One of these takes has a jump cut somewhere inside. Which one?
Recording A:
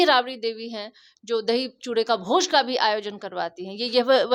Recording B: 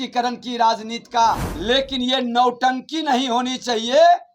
B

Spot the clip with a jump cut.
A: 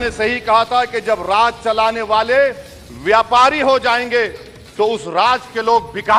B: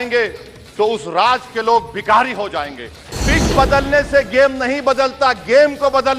B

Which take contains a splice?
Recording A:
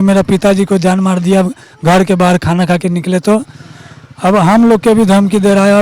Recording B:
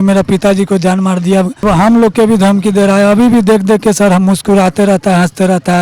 B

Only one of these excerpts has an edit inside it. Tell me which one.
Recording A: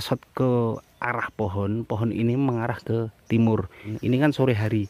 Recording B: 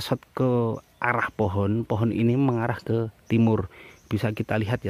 A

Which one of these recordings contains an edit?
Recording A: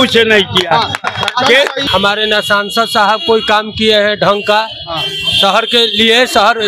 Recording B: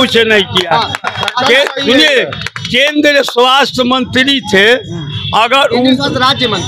A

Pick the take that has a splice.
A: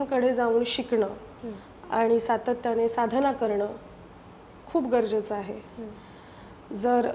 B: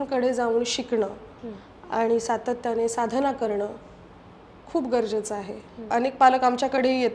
B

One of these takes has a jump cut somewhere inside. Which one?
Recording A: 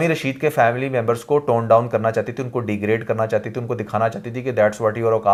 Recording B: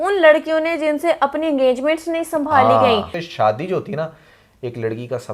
B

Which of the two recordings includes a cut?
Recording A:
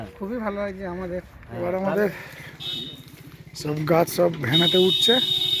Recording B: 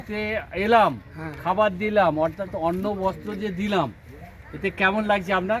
A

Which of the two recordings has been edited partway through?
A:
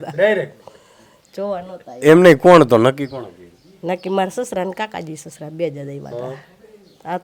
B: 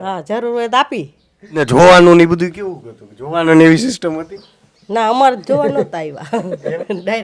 B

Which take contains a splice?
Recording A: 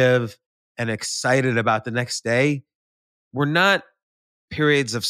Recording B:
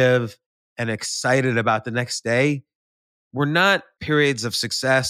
B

